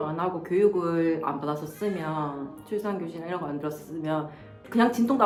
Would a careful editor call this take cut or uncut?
uncut